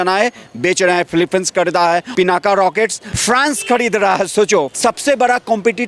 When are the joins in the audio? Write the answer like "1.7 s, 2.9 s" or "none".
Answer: 2.1 s, 3.1 s, 4.7 s